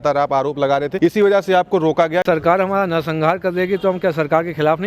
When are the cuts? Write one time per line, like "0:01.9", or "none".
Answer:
0:00.9
0:02.2